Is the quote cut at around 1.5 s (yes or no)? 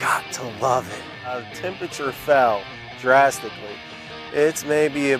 yes